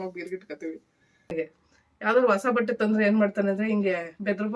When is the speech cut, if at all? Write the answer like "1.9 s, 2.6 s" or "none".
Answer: 1.3 s